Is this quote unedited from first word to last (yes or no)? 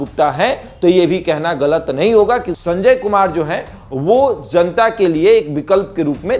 no